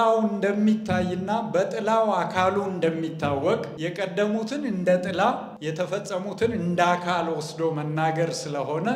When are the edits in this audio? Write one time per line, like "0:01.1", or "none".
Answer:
0:03.7
0:05.5